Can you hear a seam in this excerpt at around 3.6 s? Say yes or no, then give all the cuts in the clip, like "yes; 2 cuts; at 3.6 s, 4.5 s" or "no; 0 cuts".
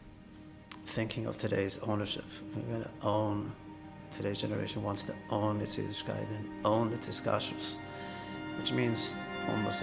no; 0 cuts